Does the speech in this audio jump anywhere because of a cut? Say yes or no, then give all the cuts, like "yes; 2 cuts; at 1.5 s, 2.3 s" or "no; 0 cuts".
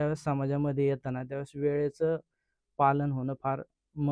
no; 0 cuts